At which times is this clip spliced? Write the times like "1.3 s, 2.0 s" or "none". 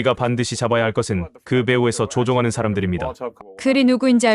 3.2 s